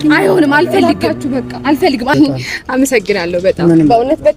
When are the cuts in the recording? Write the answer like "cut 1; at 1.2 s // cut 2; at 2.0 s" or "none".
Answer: cut 1; at 2.1 s